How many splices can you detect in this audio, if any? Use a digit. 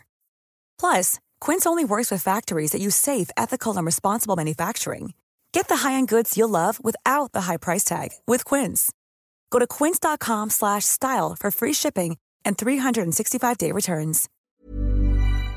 1